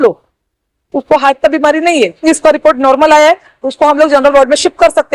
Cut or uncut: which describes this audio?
cut